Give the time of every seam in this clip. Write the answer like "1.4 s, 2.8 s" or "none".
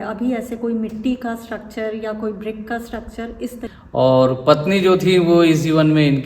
3.6 s